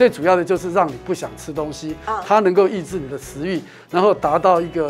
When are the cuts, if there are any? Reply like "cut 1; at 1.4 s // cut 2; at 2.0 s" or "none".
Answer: none